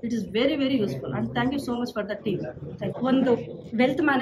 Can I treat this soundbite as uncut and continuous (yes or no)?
no